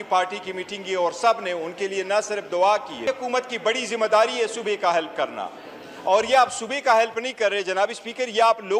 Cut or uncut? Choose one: cut